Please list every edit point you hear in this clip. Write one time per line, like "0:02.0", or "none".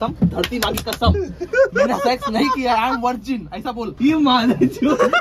0:03.9